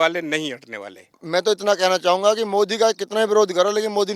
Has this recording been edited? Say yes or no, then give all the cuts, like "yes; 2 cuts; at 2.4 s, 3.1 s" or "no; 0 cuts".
yes; 1 cut; at 1.2 s